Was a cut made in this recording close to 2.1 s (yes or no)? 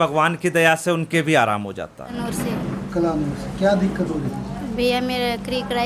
yes